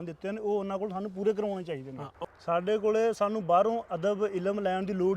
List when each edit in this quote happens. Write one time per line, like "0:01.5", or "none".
0:02.1